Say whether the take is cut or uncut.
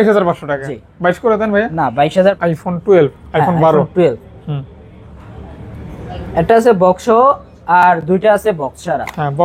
uncut